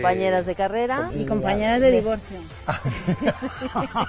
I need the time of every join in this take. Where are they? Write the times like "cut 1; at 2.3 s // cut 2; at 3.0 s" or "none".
cut 1; at 1.1 s